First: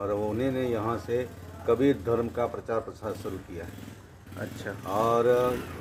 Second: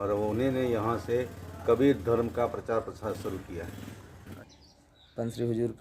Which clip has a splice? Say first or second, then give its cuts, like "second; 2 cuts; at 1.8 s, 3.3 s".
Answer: second; 1 cut; at 4.4 s